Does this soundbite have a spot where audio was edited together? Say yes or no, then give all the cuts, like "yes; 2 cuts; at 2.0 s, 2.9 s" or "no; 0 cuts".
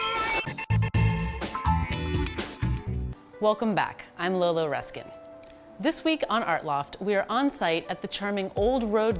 yes; 1 cut; at 7.5 s